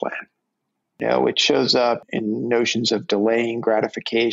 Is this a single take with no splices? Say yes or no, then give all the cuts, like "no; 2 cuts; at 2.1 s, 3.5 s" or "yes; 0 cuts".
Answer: no; 2 cuts; at 1.0 s, 2.0 s